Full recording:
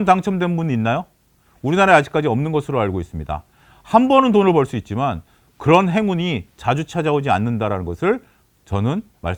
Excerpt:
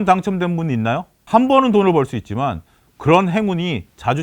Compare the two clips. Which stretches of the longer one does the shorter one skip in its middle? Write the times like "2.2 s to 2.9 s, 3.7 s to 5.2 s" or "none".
1.1 s to 3.7 s